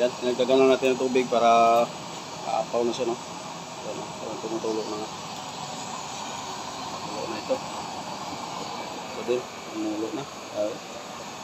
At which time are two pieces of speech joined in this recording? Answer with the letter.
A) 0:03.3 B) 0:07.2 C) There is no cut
C